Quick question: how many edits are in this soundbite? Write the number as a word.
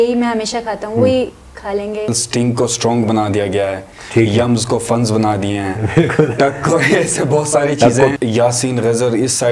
two